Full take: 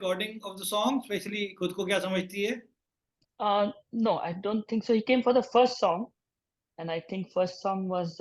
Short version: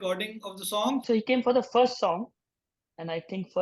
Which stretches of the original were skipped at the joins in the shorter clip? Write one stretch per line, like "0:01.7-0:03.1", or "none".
0:01.0-0:04.8